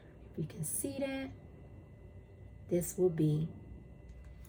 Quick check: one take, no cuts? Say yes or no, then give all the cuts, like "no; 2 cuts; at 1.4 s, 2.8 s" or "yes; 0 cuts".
yes; 0 cuts